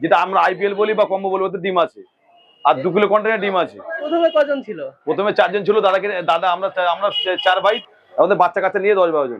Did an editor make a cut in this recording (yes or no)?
yes